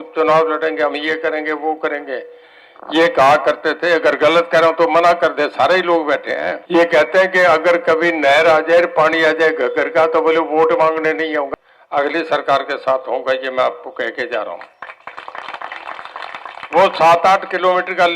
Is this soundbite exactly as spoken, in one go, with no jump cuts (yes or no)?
no